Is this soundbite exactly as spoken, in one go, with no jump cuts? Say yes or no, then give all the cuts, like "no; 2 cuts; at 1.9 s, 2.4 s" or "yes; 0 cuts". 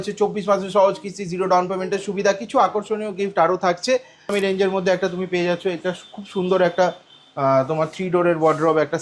no; 1 cut; at 4.3 s